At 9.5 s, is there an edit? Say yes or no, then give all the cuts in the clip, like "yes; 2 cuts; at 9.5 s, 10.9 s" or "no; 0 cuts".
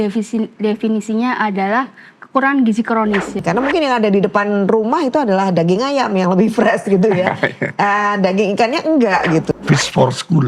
yes; 2 cuts; at 3.4 s, 9.5 s